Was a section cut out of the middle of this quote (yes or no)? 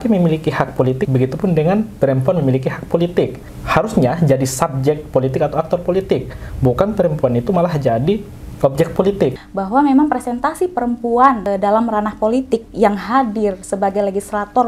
yes